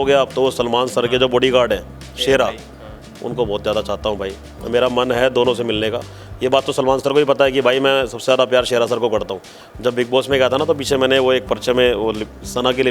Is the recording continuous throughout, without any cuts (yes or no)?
yes